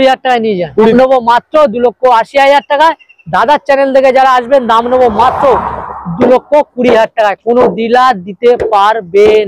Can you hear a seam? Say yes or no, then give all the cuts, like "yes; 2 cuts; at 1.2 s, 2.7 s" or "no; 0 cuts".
yes; 1 cut; at 0.9 s